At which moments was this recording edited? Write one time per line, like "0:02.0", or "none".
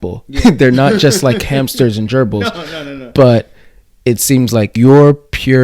0:04.7